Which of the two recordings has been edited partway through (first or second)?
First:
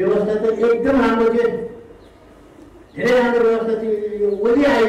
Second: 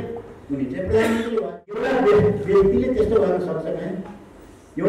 second